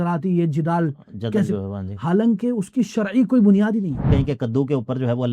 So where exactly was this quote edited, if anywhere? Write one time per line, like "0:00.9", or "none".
0:04.1